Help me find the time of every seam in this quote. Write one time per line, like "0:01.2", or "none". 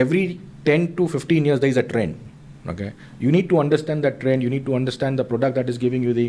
none